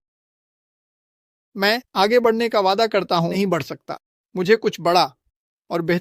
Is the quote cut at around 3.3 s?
yes; 1 cut; at 3.3 s

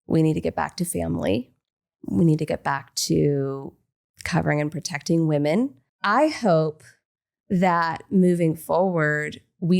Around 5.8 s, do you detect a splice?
yes; 1 cut; at 5.8 s

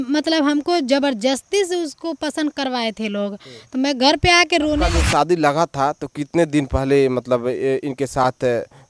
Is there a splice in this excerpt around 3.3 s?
no; 1 cut; at 4.8 s

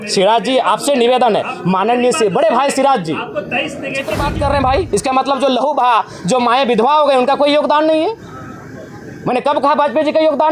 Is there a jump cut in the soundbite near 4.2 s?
yes; 1 cut; at 4.2 s

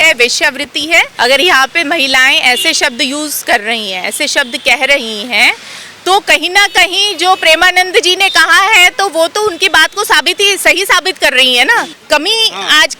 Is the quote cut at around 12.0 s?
yes; 2 cuts; at 1.1 s, 12.0 s

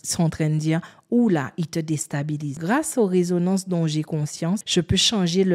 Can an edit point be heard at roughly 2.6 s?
yes; 2 cuts; at 2.6 s, 4.7 s

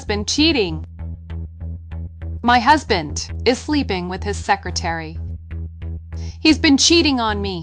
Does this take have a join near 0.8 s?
no; 0 cuts

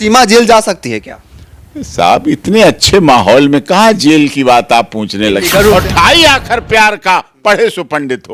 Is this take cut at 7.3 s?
no; 1 cut; at 5.7 s

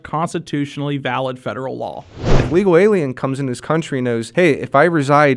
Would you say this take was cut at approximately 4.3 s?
yes; 2 cuts; at 2.3 s, 4.3 s

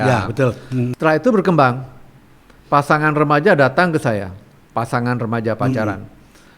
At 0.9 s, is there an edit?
yes; 1 cut; at 0.9 s

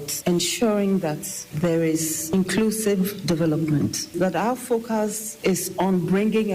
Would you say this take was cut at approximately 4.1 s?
yes; 2 cuts; at 4.1 s, 5.2 s

